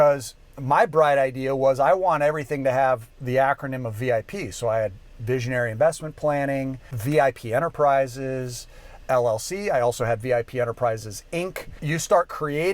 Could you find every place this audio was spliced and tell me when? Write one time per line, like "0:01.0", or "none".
0:06.9
0:11.7